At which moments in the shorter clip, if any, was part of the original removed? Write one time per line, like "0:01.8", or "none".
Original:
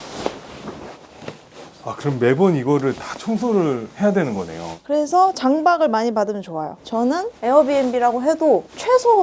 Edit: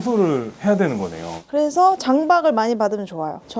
none